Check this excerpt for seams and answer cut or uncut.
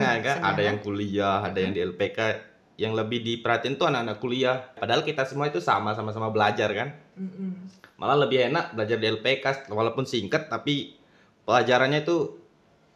uncut